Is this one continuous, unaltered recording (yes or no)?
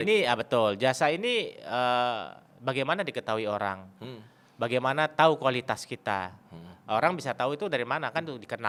yes